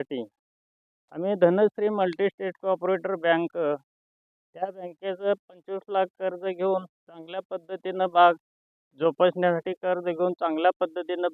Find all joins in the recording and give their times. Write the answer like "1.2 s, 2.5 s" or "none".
none